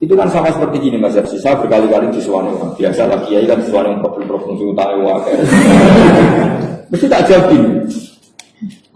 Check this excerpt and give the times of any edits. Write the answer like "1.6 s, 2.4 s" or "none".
1.3 s